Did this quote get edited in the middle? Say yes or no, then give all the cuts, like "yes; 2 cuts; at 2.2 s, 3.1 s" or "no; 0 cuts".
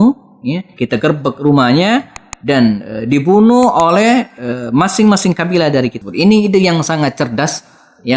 yes; 1 cut; at 6.0 s